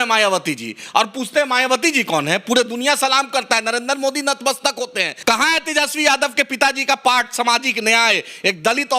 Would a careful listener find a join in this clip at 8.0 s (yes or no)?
no